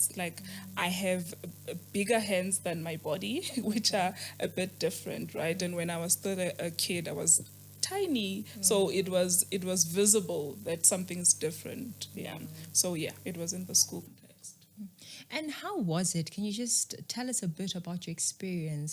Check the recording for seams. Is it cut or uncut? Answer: uncut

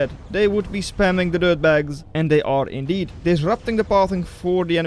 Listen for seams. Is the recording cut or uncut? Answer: cut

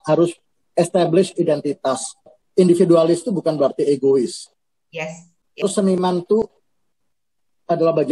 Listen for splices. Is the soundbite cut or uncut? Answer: cut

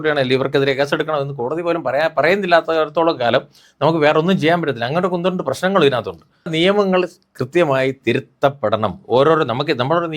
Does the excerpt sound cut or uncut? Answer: cut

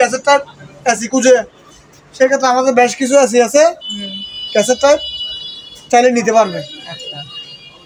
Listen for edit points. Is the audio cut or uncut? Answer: uncut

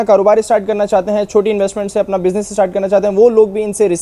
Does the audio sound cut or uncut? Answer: uncut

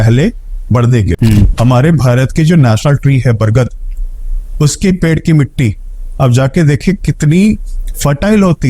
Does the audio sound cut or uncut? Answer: cut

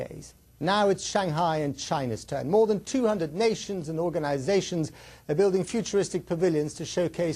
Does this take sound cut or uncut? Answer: uncut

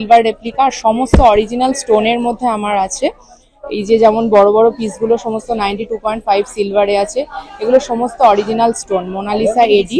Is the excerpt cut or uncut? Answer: uncut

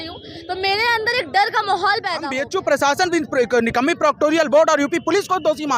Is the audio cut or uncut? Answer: cut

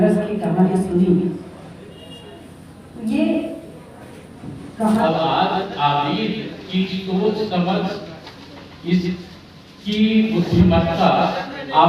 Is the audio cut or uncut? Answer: cut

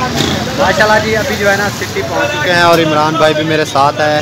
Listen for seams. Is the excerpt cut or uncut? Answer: uncut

